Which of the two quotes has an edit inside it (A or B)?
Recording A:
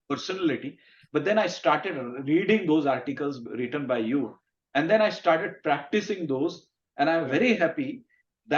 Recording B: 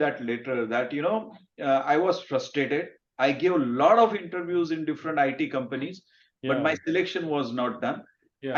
A